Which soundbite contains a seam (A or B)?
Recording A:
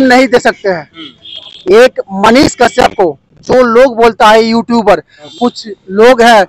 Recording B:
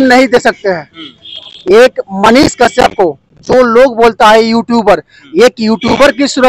A